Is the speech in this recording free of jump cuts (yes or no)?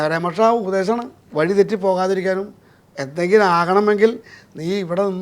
no